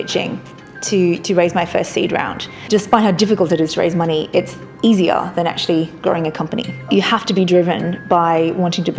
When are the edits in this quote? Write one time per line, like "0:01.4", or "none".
0:02.7
0:06.9